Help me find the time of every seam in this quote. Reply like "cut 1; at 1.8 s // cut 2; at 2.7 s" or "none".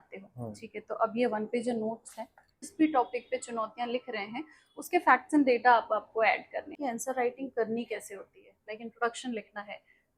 cut 1; at 2.6 s // cut 2; at 6.7 s